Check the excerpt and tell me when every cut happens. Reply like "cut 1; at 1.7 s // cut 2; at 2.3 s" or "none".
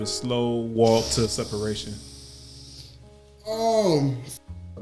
none